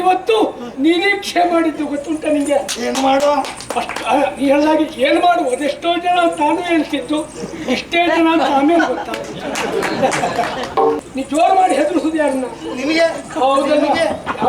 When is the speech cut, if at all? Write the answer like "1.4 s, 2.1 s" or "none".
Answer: 11.0 s